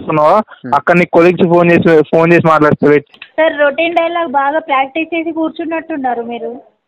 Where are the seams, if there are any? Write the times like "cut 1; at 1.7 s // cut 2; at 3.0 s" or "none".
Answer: cut 1; at 3.2 s